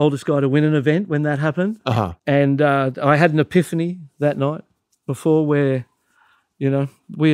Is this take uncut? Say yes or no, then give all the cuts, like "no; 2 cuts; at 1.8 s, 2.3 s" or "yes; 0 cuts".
no; 1 cut; at 2.1 s